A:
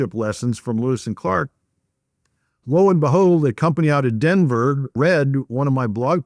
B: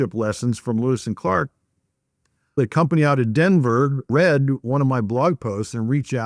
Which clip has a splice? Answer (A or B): B